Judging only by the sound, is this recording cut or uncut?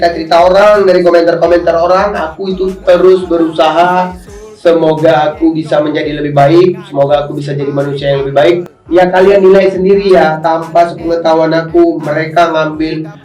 cut